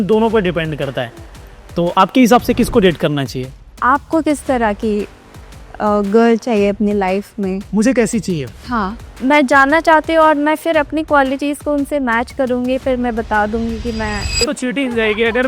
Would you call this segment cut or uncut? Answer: cut